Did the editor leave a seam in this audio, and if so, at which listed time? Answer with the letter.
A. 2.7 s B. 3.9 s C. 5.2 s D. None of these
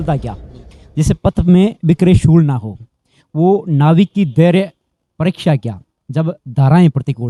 D